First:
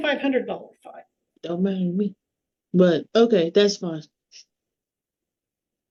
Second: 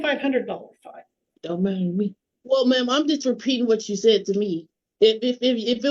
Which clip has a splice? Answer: second; 1 cut; at 2.3 s

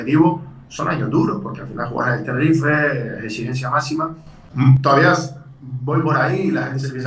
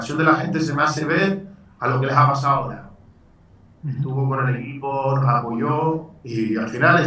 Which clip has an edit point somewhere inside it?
first; 1 cut; at 4.4 s

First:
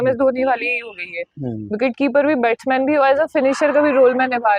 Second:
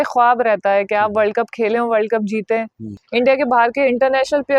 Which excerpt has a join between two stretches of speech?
second; 1 cut; at 3.0 s

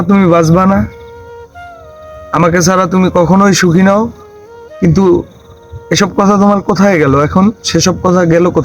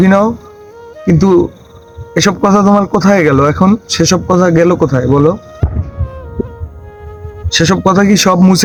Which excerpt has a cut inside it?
first; 2 cuts; at 0.9 s, 2.3 s

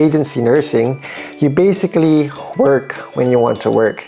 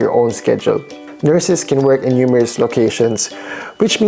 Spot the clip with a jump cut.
second; 1 cut; at 1.1 s

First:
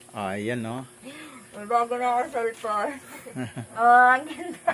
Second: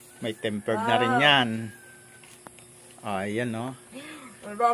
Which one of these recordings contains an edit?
first; 1 cut; at 3.6 s

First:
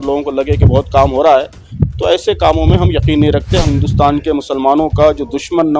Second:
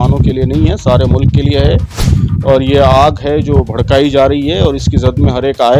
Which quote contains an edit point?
first; 1 cut; at 3.7 s

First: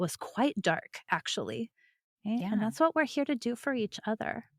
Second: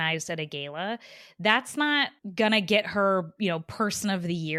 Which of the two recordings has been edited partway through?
first; 1 cut; at 2.1 s

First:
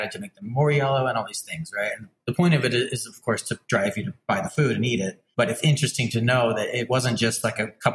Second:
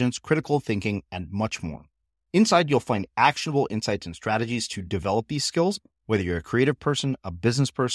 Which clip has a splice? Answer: first; 4 cuts; at 2.2 s, 4.1 s, 5.2 s, 6.9 s

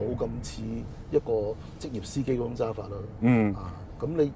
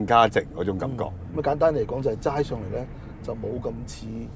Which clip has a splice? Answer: second; 1 cut; at 1.1 s

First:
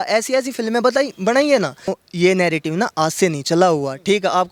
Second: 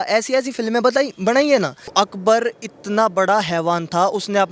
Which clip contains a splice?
second; 1 cut; at 1.9 s

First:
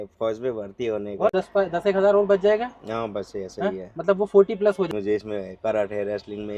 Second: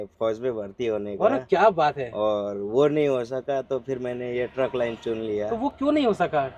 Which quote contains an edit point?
first; 2 cuts; at 1.3 s, 4.9 s

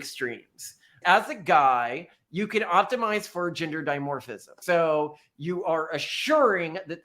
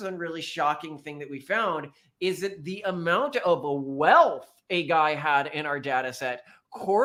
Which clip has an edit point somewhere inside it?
first; 2 cuts; at 1.0 s, 4.6 s

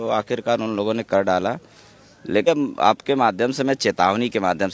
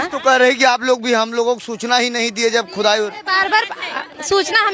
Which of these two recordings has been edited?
first; 1 cut; at 2.4 s

